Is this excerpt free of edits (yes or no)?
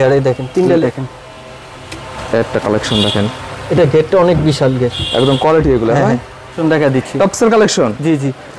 no